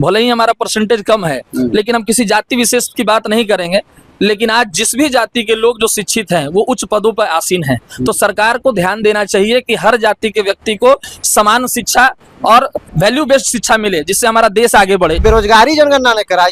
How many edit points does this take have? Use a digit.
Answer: 2